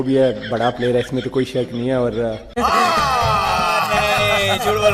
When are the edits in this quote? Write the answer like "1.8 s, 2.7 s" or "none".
none